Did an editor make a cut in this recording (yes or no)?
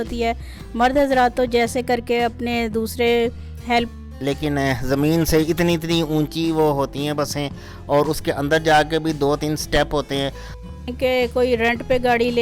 yes